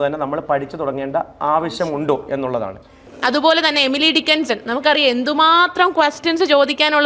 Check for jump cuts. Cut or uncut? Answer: cut